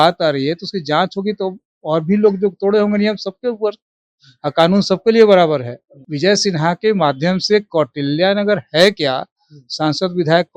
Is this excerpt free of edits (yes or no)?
no